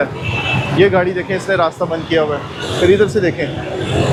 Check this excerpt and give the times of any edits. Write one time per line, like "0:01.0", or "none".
none